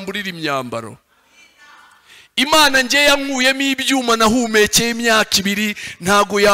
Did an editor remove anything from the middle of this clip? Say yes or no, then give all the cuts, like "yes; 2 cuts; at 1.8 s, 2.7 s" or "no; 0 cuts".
no; 0 cuts